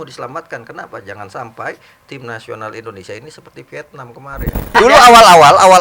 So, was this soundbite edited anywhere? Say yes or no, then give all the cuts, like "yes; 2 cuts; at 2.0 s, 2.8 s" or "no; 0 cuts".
yes; 1 cut; at 4.7 s